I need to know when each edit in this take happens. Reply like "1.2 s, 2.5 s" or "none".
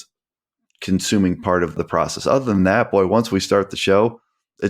1.8 s